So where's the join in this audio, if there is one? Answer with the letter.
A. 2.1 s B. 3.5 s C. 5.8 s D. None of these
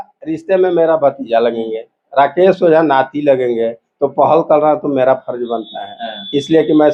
D